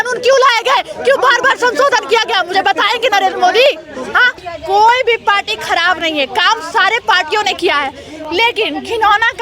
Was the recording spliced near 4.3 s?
yes; 1 cut; at 4.3 s

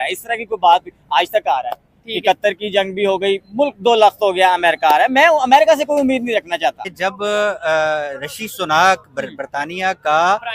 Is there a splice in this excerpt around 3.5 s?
no; 1 cut; at 6.9 s

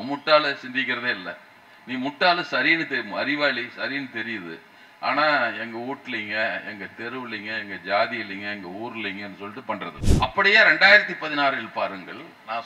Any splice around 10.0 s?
yes; 1 cut; at 10.0 s

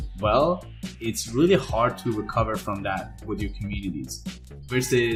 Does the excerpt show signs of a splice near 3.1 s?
no; 0 cuts

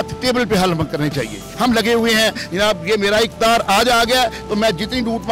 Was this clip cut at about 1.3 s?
yes; 1 cut; at 1.3 s

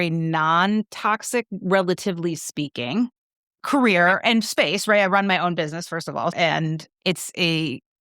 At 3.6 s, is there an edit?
yes; 2 cuts; at 3.6 s, 6.4 s

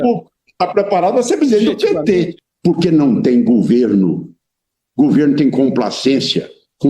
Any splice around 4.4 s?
no; 1 cut; at 2.4 s

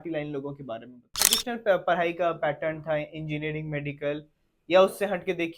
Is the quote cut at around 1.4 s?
yes; 1 cut; at 1.4 s

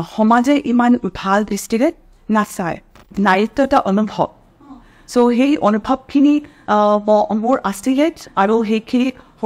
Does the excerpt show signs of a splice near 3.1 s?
yes; 1 cut; at 3.1 s

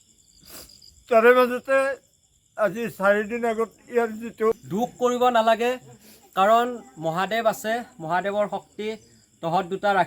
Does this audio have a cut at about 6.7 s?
no; 1 cut; at 4.6 s

